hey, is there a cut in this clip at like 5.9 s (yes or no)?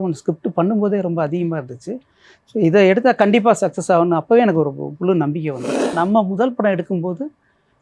yes